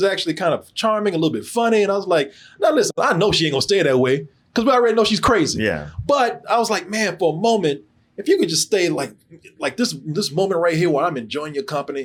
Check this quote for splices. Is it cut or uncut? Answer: uncut